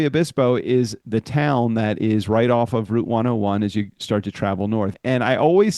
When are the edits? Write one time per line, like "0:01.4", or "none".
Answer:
0:01.0
0:05.0